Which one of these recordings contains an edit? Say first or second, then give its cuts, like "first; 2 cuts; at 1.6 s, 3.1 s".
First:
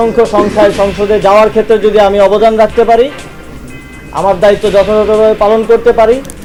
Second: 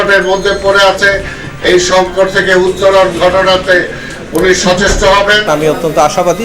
second; 1 cut; at 5.5 s